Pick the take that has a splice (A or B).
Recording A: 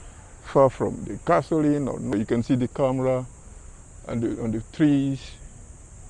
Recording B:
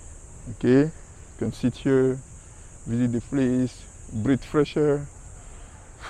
A